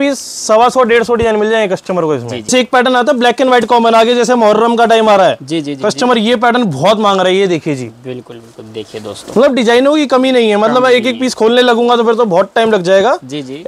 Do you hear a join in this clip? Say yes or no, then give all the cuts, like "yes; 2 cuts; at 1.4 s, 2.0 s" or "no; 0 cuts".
yes; 1 cut; at 2.5 s